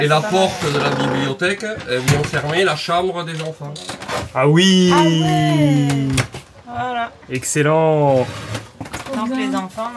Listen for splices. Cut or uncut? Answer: uncut